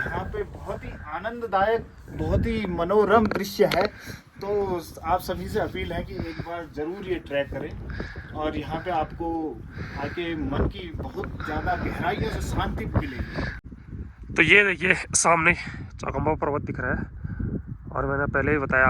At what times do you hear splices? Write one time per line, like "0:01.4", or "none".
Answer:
0:13.6